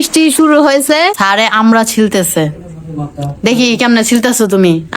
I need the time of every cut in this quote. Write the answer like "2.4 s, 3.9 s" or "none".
1.2 s